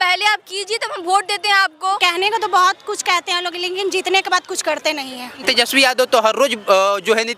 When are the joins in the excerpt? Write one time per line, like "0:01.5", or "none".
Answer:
0:02.0
0:05.4